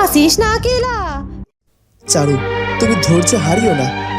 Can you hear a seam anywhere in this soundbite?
yes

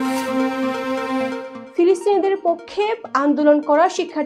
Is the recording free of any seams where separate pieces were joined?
yes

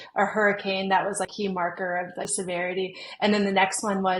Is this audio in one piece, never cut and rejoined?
no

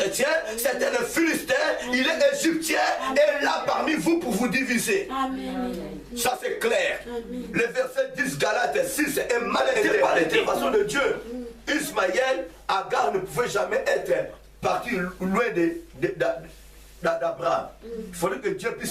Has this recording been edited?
yes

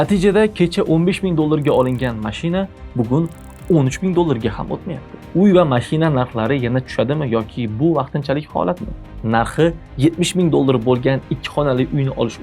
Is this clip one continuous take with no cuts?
no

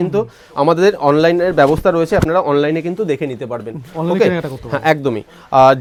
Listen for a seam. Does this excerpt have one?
no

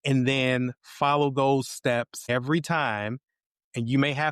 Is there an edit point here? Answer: yes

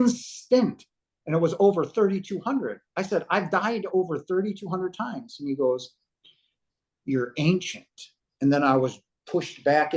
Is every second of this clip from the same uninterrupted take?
yes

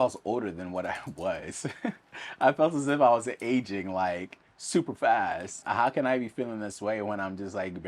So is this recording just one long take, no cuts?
no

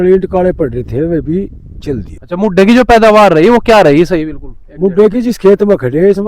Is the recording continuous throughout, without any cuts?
no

